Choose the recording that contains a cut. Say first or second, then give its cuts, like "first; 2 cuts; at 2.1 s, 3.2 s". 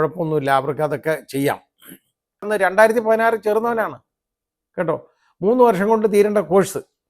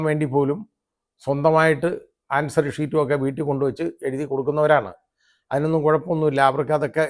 first; 1 cut; at 2.5 s